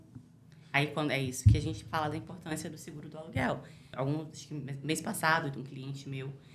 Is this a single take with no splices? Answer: no; 1 cut; at 3.9 s

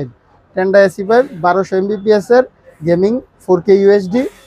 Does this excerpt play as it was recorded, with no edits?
yes; 0 cuts

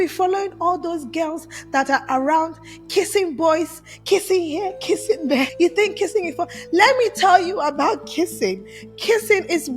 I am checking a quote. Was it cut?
yes; 1 cut; at 5.5 s

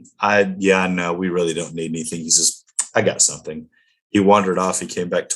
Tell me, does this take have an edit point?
no; 0 cuts

